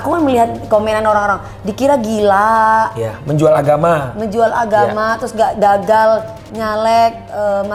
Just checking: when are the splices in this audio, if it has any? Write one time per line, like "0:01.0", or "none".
none